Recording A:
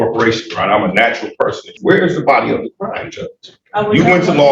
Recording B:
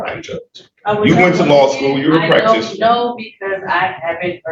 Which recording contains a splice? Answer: A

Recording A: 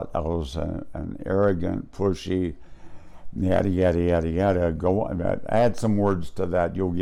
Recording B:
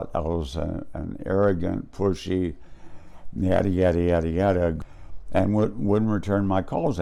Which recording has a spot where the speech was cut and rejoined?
B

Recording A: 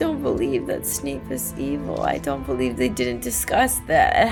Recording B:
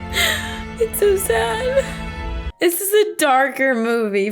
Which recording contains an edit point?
B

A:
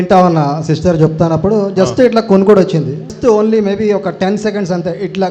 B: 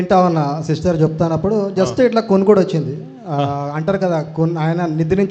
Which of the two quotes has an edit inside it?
A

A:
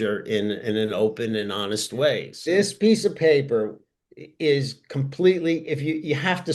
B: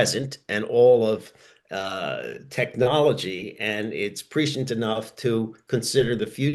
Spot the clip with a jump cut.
A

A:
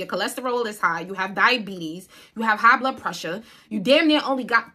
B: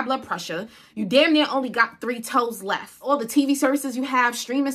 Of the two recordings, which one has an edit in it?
B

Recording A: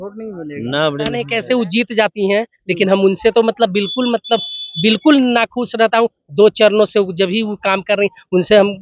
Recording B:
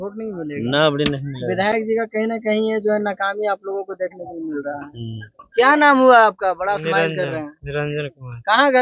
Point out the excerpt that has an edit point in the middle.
A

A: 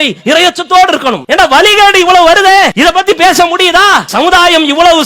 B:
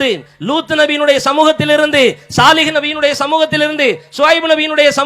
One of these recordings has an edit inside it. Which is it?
A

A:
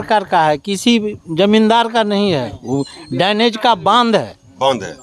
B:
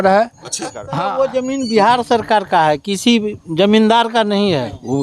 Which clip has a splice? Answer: B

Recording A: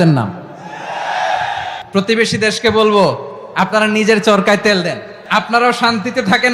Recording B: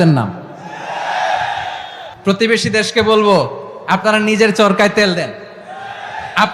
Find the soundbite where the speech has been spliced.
A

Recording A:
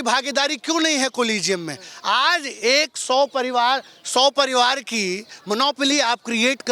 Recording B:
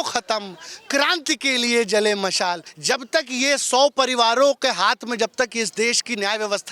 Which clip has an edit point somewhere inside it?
B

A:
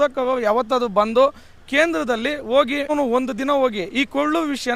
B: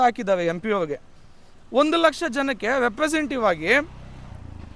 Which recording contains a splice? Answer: A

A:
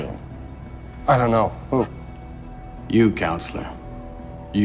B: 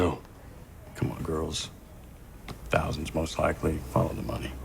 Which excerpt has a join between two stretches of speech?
B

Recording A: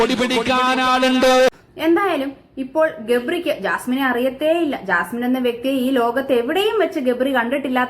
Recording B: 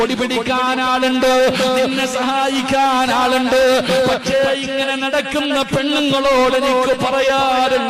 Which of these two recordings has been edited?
A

